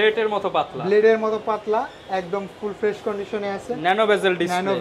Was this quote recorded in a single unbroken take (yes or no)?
yes